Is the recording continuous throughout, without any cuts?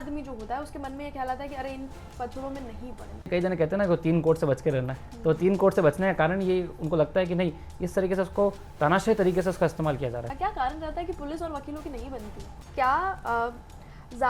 no; 3 cuts; at 3.3 s, 10.3 s, 12.7 s

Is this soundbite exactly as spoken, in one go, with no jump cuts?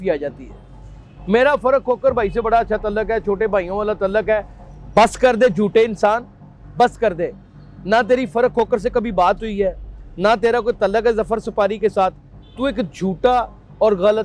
yes; 0 cuts

